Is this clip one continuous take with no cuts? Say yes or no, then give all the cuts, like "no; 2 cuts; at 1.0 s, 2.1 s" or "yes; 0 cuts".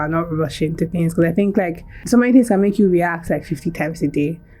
no; 1 cut; at 1.9 s